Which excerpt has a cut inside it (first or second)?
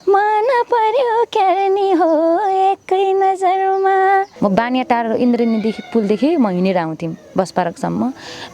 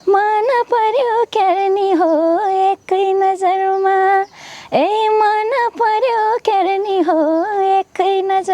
first